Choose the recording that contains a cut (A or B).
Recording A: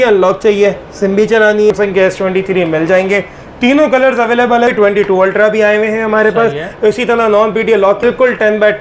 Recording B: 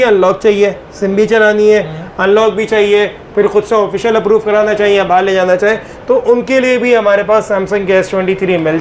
A